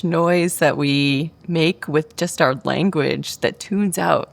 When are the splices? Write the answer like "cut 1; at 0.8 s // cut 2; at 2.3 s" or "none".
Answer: cut 1; at 1.4 s